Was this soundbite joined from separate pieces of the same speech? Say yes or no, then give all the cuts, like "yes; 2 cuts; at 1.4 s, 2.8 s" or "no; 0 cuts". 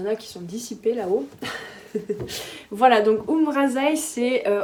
no; 0 cuts